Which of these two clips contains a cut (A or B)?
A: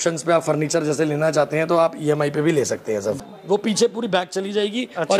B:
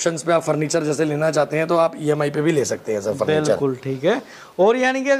A